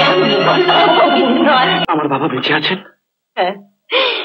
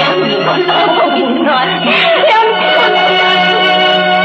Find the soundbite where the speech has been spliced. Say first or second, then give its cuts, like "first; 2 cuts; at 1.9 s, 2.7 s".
first; 1 cut; at 1.8 s